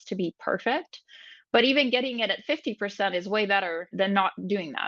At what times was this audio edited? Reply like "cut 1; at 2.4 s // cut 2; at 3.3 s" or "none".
cut 1; at 3.9 s